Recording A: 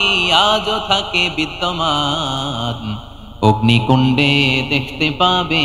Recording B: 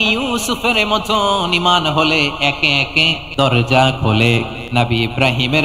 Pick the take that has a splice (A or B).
B